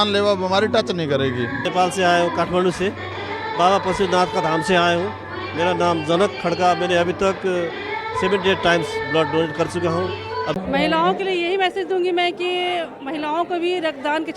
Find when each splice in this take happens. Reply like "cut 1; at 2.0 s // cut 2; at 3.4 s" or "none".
cut 1; at 1.7 s // cut 2; at 10.5 s